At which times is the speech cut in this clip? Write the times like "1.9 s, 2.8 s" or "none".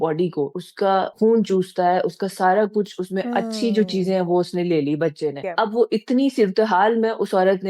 0.9 s, 5.4 s